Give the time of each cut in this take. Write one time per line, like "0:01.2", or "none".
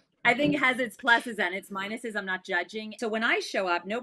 0:02.9